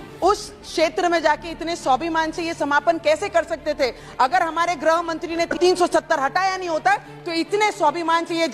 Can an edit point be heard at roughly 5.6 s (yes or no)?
yes